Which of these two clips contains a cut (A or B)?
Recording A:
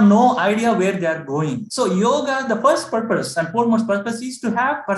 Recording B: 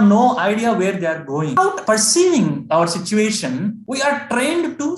B